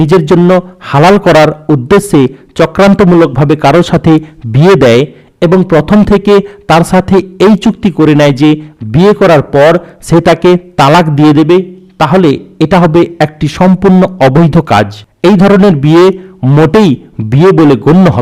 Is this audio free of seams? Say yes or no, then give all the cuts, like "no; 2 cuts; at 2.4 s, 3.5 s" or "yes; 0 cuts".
no; 1 cut; at 15.0 s